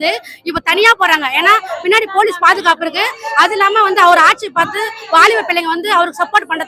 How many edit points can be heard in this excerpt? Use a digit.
0